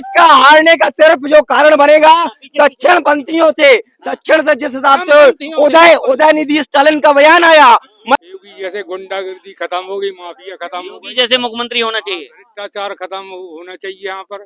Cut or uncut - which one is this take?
cut